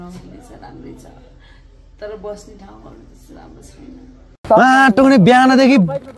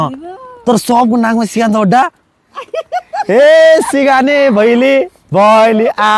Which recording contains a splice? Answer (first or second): first